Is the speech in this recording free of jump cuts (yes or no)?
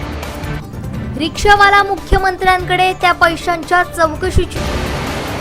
no